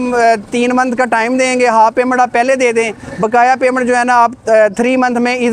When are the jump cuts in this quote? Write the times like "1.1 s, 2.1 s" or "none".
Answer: none